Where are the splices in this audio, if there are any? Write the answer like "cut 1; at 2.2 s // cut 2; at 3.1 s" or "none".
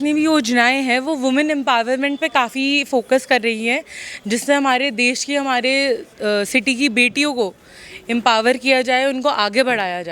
none

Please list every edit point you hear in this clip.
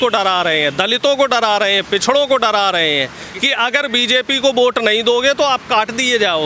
none

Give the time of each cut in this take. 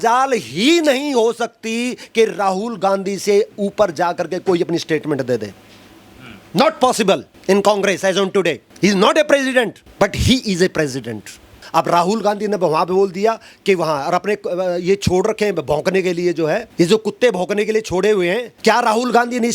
cut 1; at 7.3 s // cut 2; at 8.7 s // cut 3; at 9.8 s // cut 4; at 11.6 s // cut 5; at 16.7 s // cut 6; at 18.5 s

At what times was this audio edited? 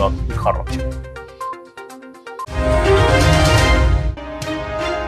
none

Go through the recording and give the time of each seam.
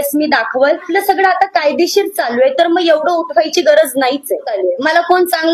cut 1; at 0.9 s // cut 2; at 4.5 s

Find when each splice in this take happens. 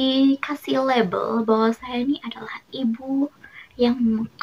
none

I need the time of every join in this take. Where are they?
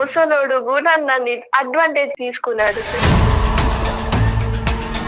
cut 1; at 2.1 s

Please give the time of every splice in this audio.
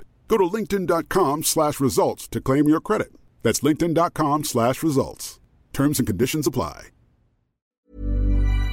cut 1; at 7.7 s

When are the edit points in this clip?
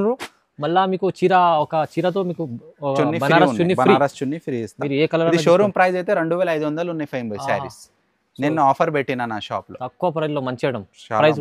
none

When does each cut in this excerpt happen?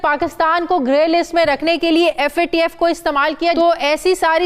cut 1; at 3.6 s

